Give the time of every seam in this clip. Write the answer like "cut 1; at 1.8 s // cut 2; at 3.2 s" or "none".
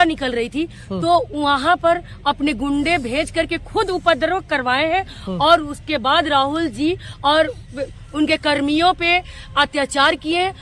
none